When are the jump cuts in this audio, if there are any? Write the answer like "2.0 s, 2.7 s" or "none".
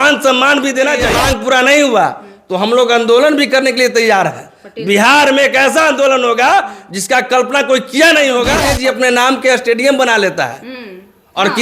1.2 s, 8.7 s